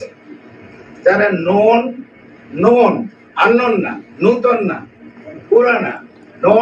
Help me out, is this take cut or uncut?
uncut